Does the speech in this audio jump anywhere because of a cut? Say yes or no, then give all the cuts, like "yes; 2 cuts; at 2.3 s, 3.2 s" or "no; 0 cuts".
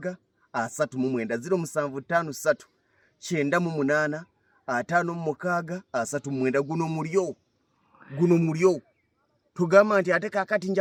no; 0 cuts